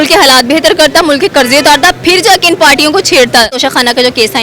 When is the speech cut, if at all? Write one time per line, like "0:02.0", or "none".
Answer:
0:03.5